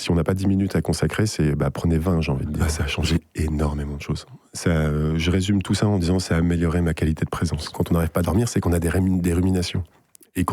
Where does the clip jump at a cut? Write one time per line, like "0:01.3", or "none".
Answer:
0:02.7
0:07.6